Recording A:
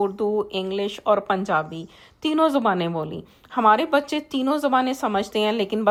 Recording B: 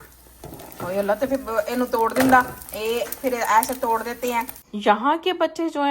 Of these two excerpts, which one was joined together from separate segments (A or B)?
B